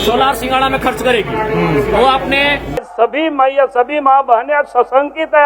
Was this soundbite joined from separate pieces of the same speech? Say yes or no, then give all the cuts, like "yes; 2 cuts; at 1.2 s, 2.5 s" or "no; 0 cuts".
yes; 1 cut; at 2.9 s